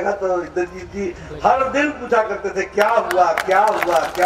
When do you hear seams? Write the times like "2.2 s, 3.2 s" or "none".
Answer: none